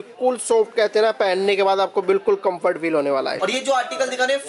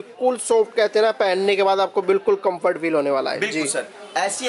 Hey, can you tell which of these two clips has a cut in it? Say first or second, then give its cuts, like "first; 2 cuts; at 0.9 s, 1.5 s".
first; 1 cut; at 3.4 s